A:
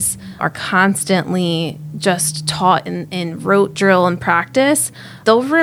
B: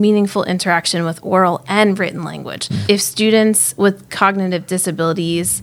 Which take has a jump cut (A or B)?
B